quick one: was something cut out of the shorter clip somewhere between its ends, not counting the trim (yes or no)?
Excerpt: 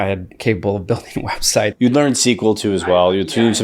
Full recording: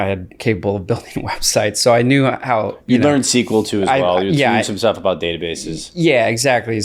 yes